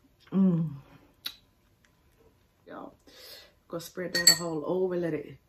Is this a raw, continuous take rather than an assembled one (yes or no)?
no